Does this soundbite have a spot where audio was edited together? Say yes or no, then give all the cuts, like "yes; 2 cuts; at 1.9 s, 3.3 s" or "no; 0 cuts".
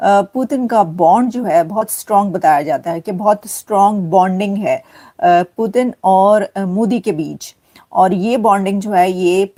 no; 0 cuts